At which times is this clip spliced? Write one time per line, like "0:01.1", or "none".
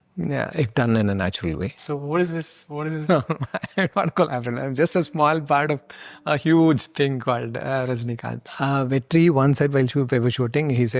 0:01.7
0:08.4